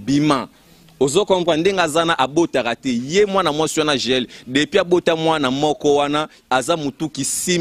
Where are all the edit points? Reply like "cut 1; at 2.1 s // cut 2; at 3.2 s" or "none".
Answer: none